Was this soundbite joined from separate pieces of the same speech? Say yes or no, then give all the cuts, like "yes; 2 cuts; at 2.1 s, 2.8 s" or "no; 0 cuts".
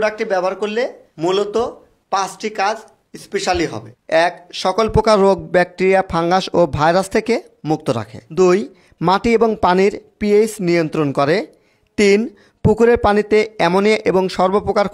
yes; 2 cuts; at 1.0 s, 8.2 s